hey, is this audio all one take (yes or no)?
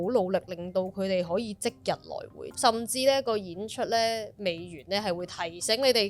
no